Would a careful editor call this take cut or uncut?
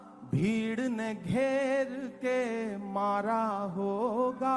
uncut